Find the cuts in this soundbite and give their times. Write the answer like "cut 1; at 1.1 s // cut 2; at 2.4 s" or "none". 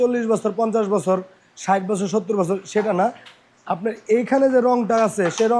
none

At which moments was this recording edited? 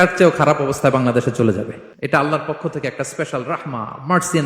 cut 1; at 1.8 s

